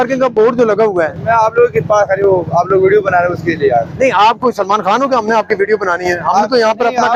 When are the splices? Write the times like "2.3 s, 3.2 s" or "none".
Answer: none